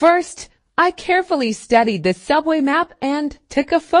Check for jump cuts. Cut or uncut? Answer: cut